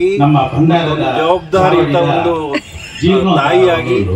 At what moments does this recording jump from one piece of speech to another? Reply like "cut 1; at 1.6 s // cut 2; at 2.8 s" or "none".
none